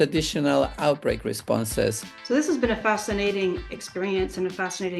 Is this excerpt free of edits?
no; 1 cut; at 2.1 s

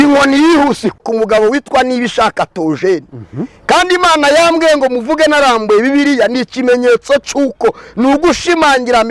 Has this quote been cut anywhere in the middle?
yes; 1 cut; at 1.0 s

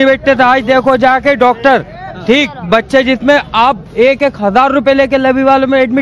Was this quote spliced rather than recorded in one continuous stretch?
no; 0 cuts

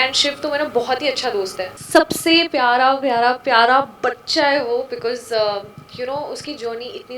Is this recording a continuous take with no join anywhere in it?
no; 1 cut; at 1.7 s

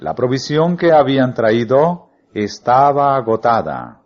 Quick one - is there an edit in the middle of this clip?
yes; 1 cut; at 1.0 s

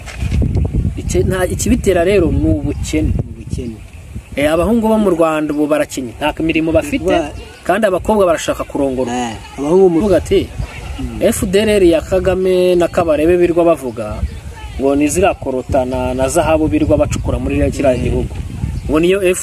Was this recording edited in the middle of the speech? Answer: yes; 1 cut; at 10.0 s

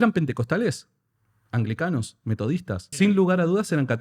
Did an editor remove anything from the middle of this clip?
yes; 1 cut; at 2.8 s

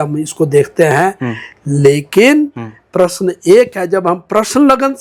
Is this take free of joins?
yes; 0 cuts

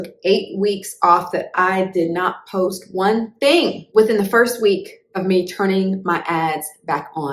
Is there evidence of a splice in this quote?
yes; 1 cut; at 3.8 s

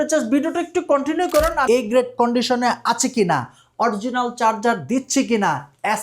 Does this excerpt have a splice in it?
yes; 1 cut; at 1.6 s

